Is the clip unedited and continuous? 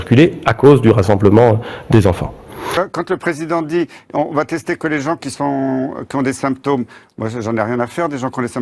no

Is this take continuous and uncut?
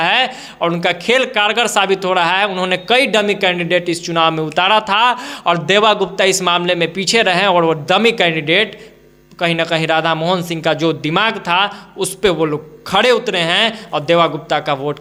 yes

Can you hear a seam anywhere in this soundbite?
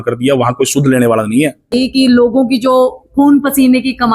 yes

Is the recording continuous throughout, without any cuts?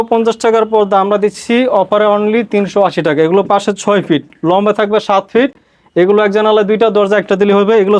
yes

